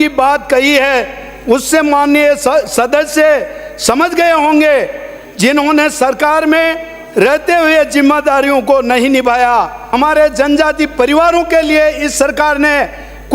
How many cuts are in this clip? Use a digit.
1